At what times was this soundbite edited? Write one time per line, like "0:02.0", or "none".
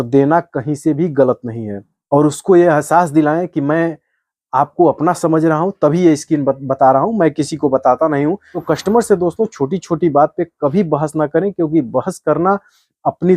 0:01.9
0:08.5